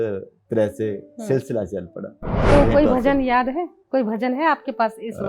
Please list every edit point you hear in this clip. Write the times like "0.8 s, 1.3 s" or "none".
2.4 s